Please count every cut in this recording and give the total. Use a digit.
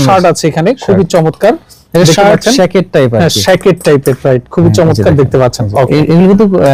0